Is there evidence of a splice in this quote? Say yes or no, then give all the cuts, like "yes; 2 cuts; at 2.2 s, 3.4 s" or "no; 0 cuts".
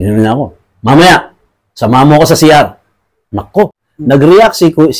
yes; 1 cut; at 3.9 s